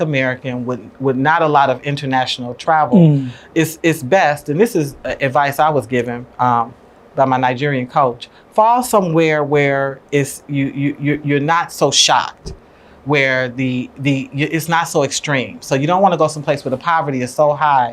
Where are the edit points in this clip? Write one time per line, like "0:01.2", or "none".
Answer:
none